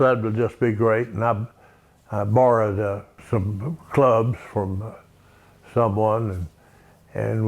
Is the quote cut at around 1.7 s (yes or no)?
no